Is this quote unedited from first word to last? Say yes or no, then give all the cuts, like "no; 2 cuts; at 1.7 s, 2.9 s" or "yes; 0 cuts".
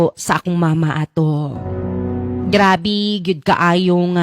yes; 0 cuts